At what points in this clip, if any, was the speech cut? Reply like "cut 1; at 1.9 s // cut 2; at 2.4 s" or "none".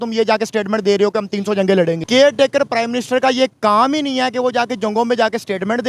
cut 1; at 2.0 s